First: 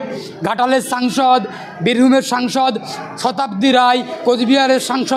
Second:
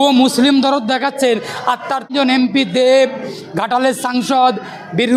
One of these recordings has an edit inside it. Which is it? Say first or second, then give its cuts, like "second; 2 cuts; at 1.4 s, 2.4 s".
second; 1 cut; at 2.2 s